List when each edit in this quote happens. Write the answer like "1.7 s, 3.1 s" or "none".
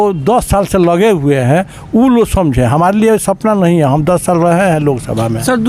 none